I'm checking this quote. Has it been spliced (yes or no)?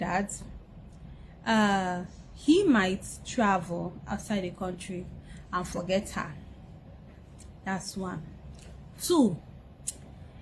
no